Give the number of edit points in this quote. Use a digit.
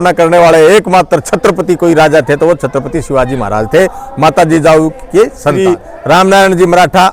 0